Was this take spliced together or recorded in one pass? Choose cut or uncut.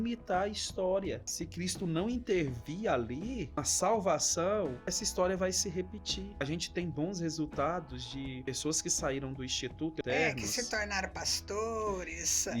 cut